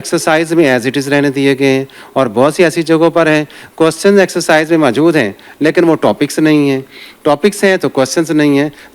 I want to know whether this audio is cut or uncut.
uncut